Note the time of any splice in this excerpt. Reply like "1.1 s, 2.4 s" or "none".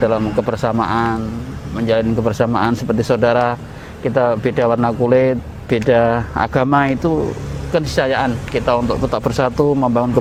none